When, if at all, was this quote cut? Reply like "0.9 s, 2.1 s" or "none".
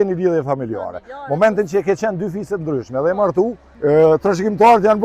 3.6 s